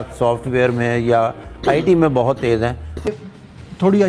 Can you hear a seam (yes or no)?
yes